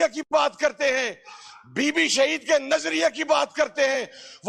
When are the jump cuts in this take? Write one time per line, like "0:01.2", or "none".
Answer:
none